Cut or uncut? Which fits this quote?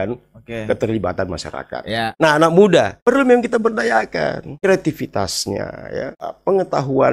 cut